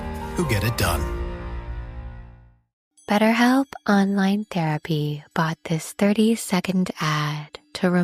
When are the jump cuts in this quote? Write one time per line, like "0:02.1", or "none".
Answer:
0:02.7